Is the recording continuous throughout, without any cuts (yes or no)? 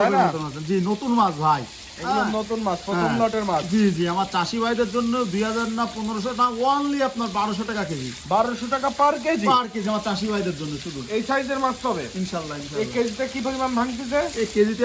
yes